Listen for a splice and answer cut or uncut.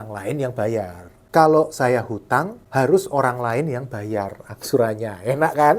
cut